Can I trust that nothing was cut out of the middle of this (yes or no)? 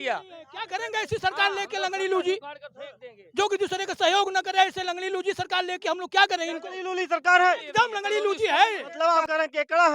no